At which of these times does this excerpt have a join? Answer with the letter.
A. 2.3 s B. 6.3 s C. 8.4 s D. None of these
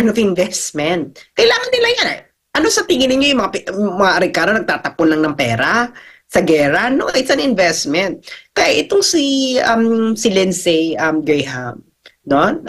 D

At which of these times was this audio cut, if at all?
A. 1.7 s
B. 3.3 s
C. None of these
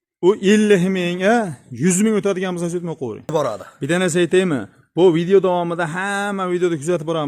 B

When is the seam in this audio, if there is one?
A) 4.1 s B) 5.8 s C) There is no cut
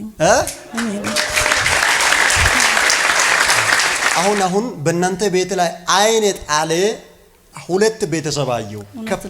A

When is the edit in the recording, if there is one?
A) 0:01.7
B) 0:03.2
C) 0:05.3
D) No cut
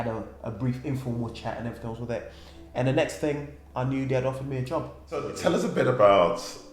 C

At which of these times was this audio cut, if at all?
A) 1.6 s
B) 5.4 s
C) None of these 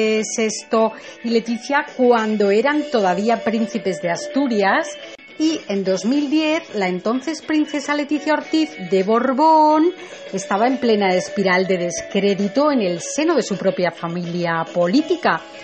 A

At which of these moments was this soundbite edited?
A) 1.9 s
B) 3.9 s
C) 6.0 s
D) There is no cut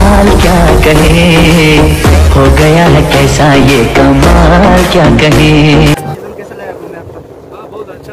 C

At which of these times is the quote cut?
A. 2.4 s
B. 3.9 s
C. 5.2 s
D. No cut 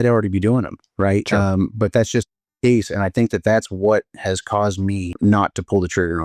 C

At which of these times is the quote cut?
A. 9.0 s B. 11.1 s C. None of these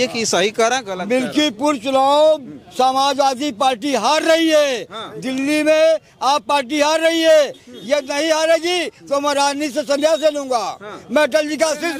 C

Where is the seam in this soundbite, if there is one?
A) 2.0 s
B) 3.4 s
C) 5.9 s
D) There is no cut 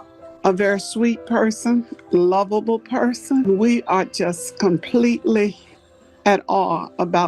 B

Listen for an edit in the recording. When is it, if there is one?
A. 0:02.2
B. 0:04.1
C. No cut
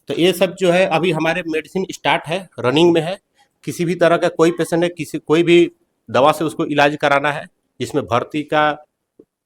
A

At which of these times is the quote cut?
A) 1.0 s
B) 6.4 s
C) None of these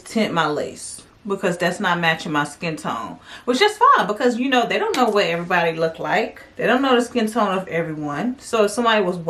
C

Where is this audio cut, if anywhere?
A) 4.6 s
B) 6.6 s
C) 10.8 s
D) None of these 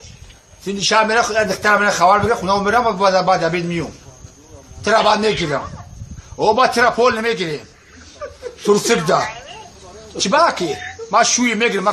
A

